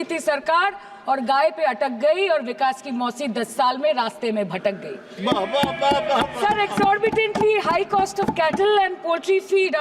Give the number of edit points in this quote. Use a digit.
0